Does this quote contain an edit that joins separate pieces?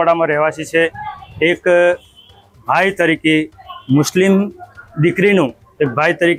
no; 0 cuts

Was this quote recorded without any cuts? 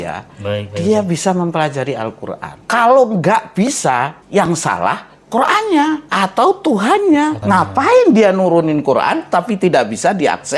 no; 4 cuts; at 2.5 s, 4.2 s, 6.1 s, 7.4 s

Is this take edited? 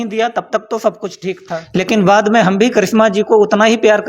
yes; 1 cut; at 1.6 s

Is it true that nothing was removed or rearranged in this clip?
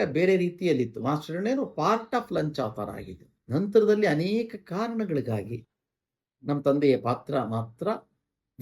yes; 0 cuts

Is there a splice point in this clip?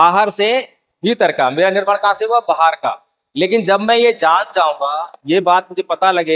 no; 0 cuts

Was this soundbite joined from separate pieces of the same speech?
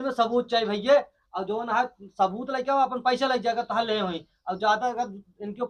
no; 0 cuts

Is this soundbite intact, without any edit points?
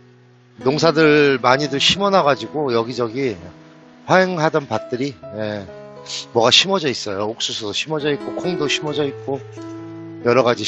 yes; 0 cuts

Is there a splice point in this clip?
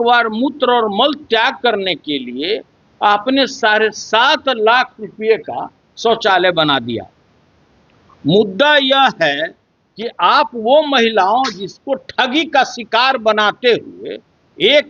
no; 0 cuts

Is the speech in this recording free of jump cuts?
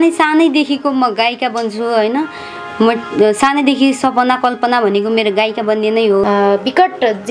no; 1 cut; at 6.2 s

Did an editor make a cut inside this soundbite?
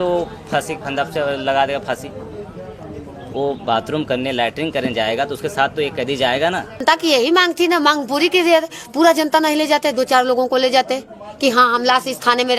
yes; 1 cut; at 6.8 s

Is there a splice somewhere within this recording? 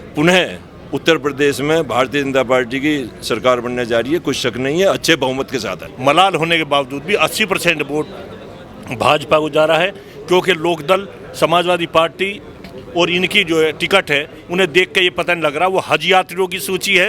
yes; 1 cut; at 5.9 s

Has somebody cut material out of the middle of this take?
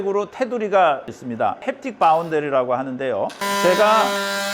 yes; 2 cuts; at 1.5 s, 3.4 s

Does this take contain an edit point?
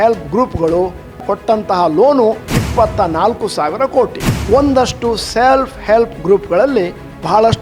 yes; 3 cuts; at 1.2 s, 2.4 s, 4.3 s

